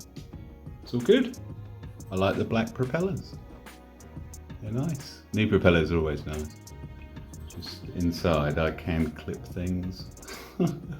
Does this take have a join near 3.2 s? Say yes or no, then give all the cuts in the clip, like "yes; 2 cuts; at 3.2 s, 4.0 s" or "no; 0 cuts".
yes; 4 cuts; at 3.2 s, 4.6 s, 6.6 s, 7.9 s